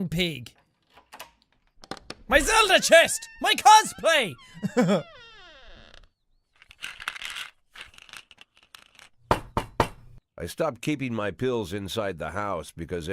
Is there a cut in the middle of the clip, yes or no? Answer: yes